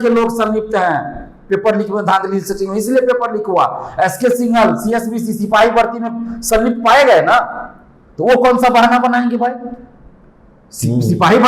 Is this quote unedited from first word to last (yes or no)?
yes